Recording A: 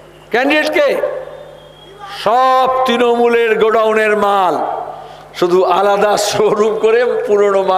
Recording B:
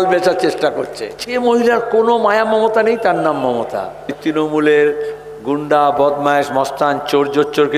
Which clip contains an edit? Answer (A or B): B